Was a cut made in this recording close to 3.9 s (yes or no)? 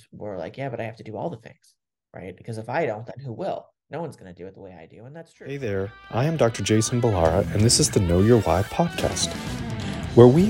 no